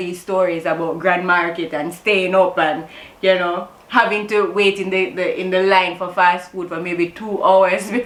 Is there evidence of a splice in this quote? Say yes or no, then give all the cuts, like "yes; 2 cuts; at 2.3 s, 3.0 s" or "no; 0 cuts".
no; 0 cuts